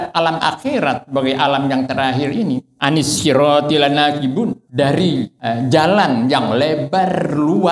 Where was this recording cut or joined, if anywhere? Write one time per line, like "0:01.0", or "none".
0:02.7
0:04.6
0:05.3